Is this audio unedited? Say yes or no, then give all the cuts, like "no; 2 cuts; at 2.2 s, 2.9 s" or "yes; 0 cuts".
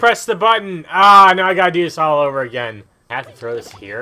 no; 1 cut; at 3.1 s